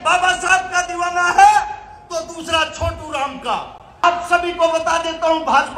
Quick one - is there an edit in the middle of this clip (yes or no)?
yes